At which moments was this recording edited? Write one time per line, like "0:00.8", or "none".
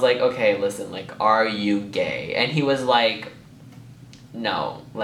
none